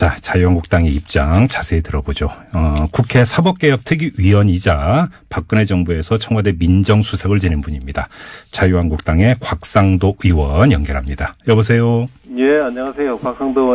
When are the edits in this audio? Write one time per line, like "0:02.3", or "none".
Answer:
none